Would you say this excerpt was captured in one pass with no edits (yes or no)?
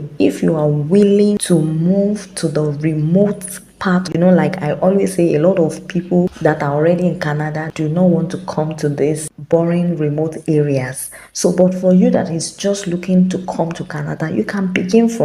no